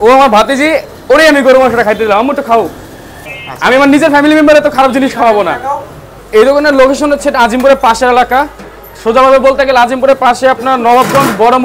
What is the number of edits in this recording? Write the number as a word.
zero